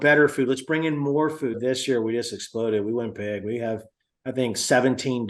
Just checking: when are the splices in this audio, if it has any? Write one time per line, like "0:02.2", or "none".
0:01.6